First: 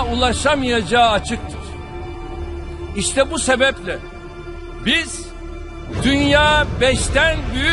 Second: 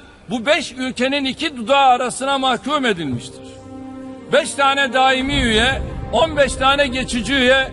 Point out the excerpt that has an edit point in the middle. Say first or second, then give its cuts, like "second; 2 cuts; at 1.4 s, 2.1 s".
second; 1 cut; at 5.5 s